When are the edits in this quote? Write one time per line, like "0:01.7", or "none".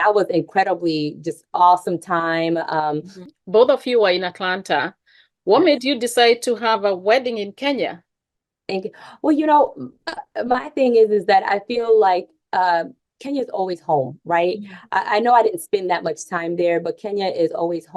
0:03.1